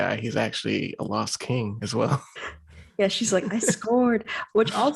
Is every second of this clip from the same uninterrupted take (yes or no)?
no